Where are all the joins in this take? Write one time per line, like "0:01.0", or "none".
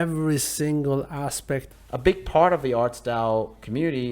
0:01.7